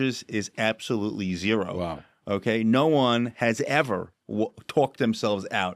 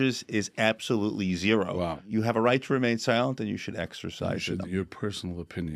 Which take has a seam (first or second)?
second